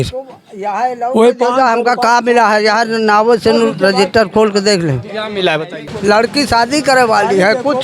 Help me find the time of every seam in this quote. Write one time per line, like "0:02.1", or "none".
0:05.8